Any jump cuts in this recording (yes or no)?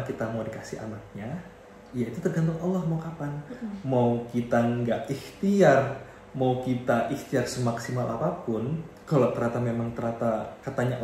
no